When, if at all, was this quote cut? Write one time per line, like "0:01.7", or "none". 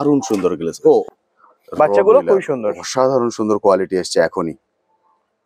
0:01.0